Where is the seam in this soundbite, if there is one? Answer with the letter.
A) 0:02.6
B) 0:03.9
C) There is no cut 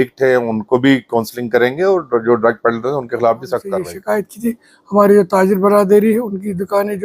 B